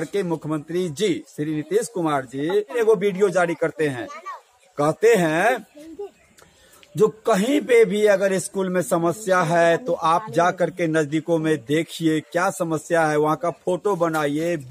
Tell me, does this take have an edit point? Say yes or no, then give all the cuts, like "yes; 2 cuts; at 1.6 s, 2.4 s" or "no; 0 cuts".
yes; 1 cut; at 2.8 s